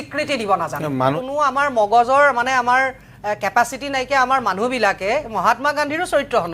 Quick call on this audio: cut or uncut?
cut